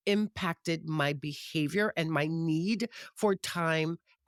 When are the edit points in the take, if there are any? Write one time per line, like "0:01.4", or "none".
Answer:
none